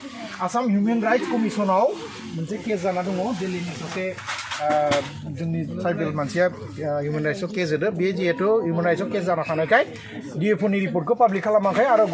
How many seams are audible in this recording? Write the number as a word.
zero